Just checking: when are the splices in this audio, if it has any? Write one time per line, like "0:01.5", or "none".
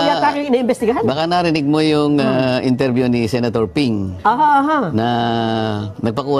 none

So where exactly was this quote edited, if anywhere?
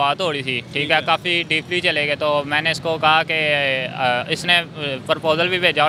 none

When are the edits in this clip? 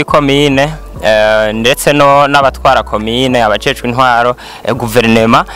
none

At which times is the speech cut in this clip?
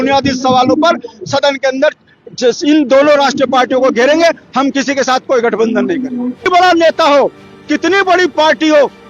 0:06.5

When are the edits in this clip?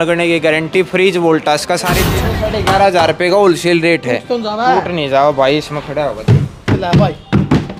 0:02.2

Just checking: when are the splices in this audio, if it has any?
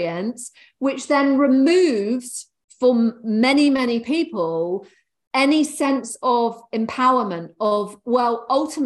none

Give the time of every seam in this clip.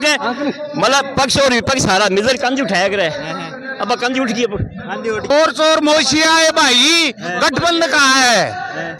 0:05.3

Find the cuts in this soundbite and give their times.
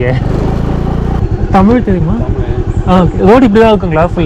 0:01.2

